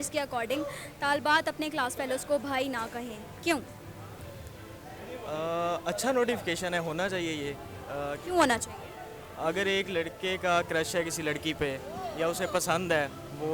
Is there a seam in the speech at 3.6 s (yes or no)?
no